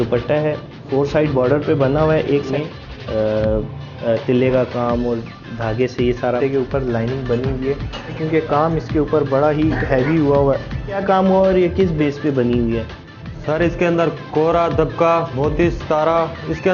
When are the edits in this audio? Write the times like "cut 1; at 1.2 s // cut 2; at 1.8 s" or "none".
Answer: cut 1; at 2.5 s // cut 2; at 3.8 s // cut 3; at 6.4 s // cut 4; at 8.2 s // cut 5; at 11.0 s // cut 6; at 15.3 s